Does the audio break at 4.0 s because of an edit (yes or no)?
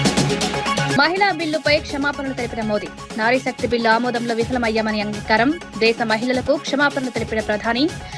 no